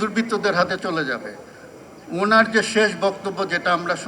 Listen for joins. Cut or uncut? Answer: uncut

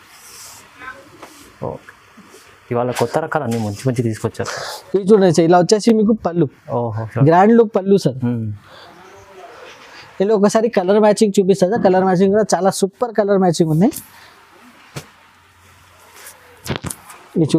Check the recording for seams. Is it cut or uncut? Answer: uncut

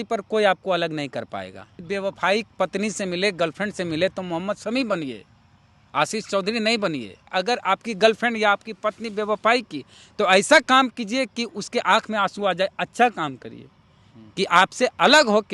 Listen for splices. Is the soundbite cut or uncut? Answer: cut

